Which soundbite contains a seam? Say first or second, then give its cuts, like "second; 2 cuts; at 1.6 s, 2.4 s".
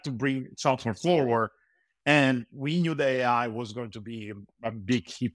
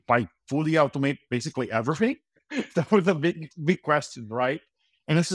second; 1 cut; at 2.3 s